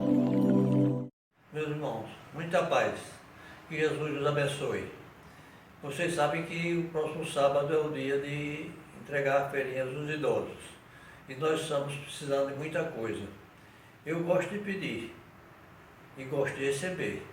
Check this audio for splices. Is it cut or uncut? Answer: cut